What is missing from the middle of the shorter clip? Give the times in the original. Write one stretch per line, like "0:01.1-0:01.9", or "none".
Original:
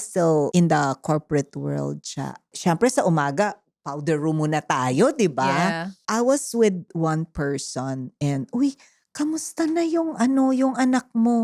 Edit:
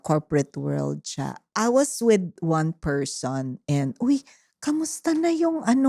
0:02.4-0:05.9